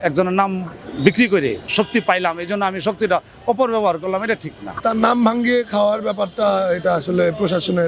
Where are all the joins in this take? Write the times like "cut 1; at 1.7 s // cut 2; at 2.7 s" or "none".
cut 1; at 1.6 s // cut 2; at 4.8 s